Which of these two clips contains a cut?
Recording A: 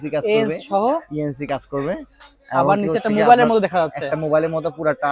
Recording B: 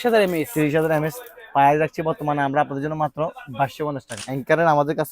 B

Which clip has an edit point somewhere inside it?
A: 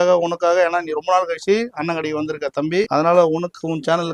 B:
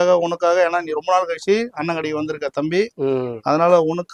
A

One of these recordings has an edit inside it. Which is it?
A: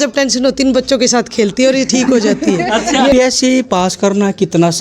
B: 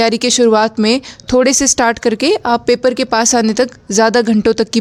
A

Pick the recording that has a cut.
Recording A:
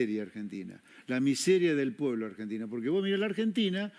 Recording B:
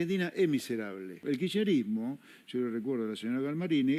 B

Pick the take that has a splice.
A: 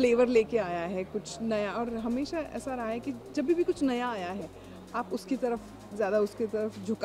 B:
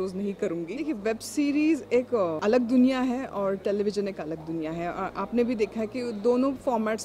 B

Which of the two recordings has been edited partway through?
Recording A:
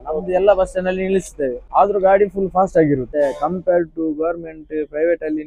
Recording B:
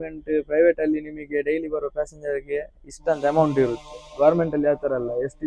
A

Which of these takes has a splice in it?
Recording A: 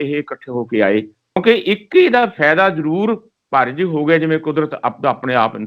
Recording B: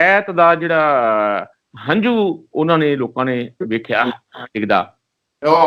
A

